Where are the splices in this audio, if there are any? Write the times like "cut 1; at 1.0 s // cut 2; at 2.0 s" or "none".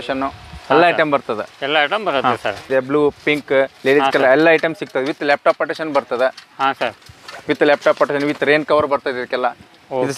cut 1; at 2.6 s